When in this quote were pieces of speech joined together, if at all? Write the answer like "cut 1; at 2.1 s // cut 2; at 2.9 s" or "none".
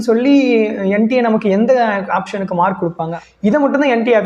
cut 1; at 3.2 s